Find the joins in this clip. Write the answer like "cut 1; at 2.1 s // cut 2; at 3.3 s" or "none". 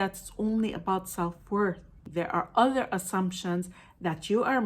cut 1; at 2.1 s